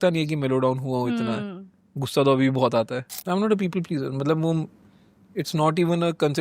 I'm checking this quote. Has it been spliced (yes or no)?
yes